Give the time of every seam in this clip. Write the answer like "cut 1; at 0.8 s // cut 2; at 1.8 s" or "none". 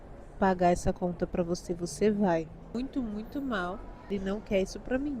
cut 1; at 2.7 s // cut 2; at 4.1 s